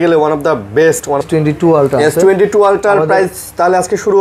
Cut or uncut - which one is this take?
cut